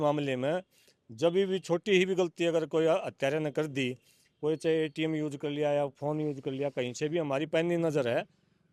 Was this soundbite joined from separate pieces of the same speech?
no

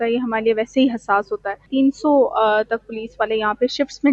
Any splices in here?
yes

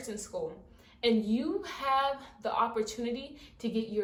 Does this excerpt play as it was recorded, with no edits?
yes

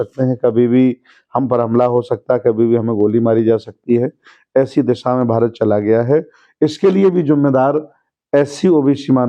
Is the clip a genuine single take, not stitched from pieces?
yes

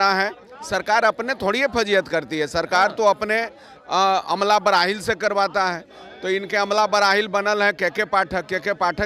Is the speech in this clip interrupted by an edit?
no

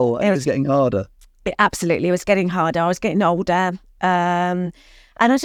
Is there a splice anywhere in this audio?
no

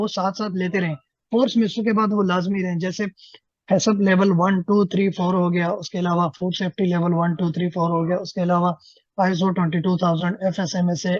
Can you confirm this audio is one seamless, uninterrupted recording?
yes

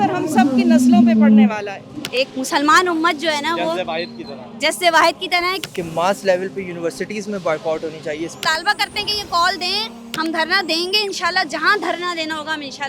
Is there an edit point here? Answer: yes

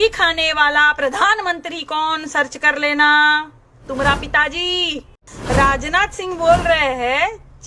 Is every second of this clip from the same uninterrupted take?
no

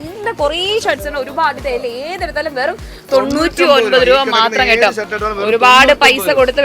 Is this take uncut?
yes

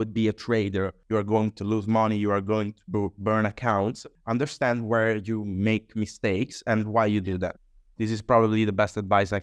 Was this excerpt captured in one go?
no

